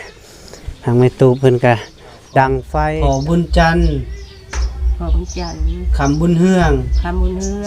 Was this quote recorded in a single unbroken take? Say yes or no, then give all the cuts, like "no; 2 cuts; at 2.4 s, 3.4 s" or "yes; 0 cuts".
no; 1 cut; at 2.9 s